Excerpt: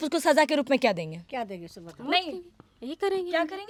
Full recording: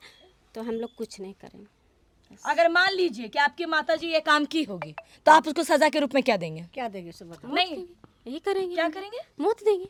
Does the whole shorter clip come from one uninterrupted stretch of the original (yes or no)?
yes